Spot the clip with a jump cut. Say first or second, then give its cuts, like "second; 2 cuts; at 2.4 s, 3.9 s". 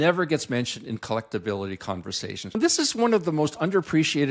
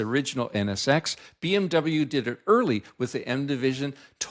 first; 1 cut; at 2.6 s